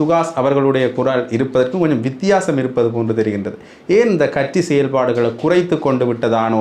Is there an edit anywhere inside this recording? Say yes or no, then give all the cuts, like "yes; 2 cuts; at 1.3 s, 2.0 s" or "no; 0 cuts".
no; 0 cuts